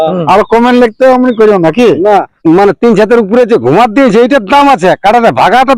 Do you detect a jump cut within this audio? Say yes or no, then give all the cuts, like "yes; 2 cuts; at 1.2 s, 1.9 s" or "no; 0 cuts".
yes; 1 cut; at 2.3 s